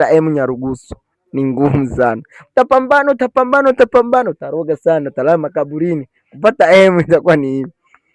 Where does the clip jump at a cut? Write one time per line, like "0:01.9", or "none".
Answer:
none

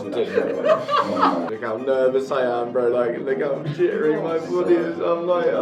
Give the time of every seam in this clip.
0:01.5

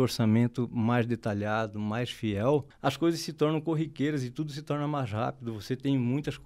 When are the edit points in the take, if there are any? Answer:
0:02.7

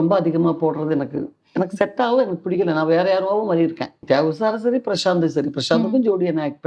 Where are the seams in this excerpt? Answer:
0:04.0

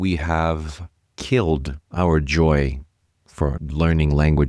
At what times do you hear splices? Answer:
0:03.6

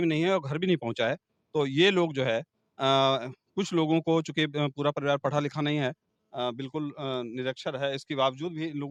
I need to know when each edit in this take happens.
none

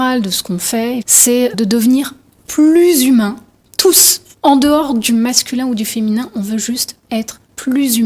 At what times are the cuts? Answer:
0:01.1

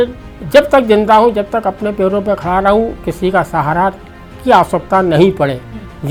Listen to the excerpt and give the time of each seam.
none

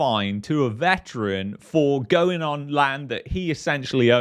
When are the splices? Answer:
none

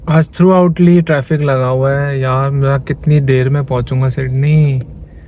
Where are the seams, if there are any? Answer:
none

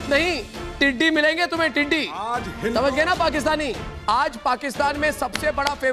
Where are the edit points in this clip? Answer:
0:03.9

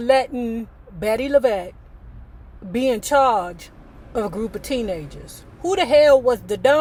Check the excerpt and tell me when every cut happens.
none

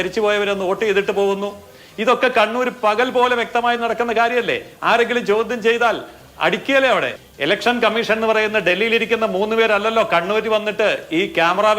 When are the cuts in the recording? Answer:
0:07.2

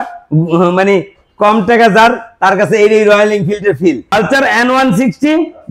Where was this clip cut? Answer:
0:04.0

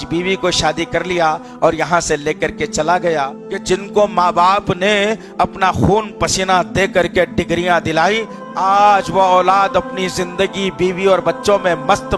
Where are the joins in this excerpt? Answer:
0:03.4
0:08.4

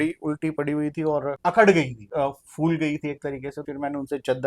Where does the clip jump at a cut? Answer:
0:01.4
0:02.0
0:03.7

